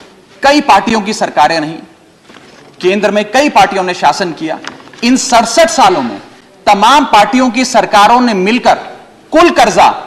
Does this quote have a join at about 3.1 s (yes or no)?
no